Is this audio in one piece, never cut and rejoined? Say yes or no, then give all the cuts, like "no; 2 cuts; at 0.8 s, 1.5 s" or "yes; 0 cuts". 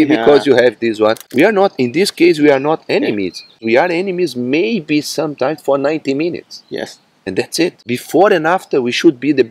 no; 3 cuts; at 1.2 s, 3.6 s, 7.8 s